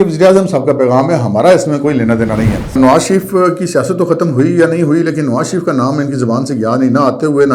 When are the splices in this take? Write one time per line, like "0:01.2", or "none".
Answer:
0:02.8